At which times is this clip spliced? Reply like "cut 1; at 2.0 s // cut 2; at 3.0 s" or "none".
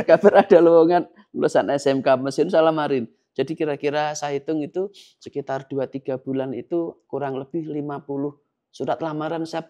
none